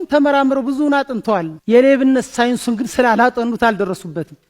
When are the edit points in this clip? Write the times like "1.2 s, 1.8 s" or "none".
1.5 s

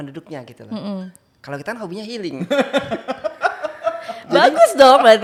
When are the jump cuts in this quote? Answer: none

